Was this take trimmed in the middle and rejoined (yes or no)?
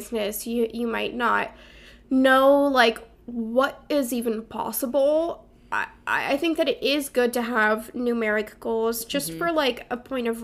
no